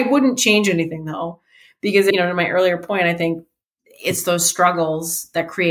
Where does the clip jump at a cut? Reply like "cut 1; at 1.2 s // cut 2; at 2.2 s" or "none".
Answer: cut 1; at 2.1 s